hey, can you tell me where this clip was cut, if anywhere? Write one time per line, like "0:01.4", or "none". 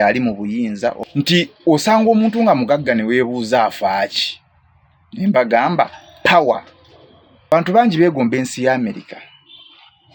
0:01.0
0:07.5